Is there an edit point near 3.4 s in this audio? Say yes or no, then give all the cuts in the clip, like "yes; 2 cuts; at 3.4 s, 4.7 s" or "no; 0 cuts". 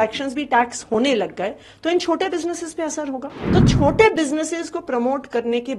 yes; 1 cut; at 3.4 s